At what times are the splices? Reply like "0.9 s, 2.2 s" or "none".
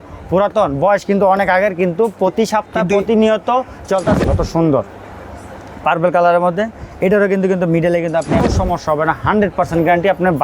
4.2 s, 8.4 s